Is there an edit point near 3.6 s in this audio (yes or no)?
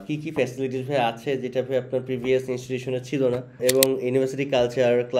yes